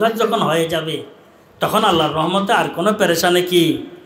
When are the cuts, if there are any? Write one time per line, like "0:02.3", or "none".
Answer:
none